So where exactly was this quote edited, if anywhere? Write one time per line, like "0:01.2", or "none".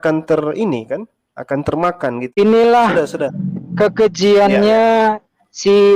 0:02.2